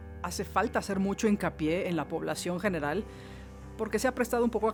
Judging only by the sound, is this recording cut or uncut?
uncut